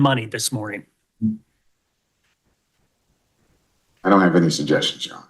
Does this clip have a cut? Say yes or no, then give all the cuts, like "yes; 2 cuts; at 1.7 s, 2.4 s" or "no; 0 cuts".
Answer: yes; 1 cut; at 2.9 s